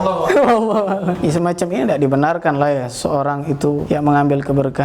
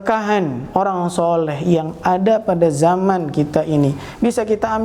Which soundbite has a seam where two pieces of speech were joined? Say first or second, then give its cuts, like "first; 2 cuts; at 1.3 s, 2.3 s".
first; 2 cuts; at 1.2 s, 3.8 s